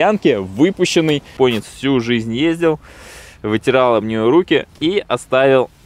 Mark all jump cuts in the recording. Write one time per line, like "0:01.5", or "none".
0:01.3